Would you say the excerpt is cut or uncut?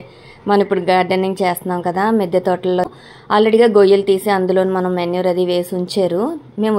cut